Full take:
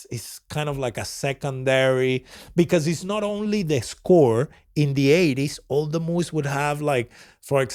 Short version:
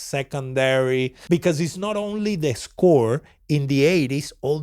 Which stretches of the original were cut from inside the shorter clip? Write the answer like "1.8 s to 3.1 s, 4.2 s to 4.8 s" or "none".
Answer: 2.3 s to 2.4 s